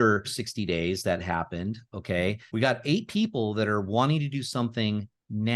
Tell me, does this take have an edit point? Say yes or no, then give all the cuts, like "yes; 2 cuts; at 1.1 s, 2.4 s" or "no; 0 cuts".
yes; 1 cut; at 2.4 s